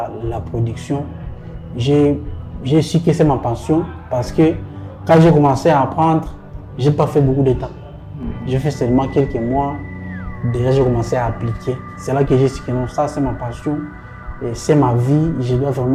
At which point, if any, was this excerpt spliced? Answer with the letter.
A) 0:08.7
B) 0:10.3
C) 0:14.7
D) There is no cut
D